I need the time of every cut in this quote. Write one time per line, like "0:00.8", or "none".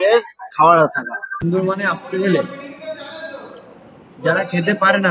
0:01.2